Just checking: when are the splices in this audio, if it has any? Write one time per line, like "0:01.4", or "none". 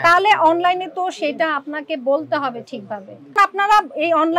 0:03.4